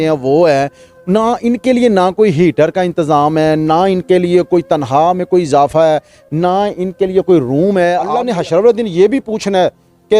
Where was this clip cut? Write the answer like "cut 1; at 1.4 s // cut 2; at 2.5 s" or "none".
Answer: cut 1; at 8.2 s